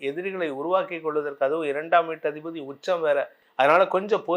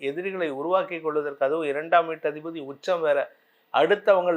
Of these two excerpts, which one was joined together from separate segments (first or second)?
first